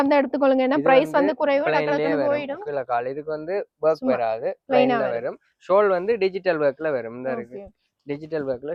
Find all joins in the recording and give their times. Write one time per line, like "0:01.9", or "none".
none